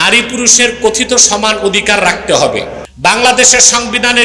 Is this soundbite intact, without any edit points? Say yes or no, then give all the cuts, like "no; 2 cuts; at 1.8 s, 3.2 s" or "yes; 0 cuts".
no; 1 cut; at 2.8 s